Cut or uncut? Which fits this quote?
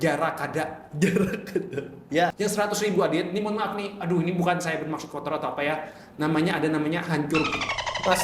cut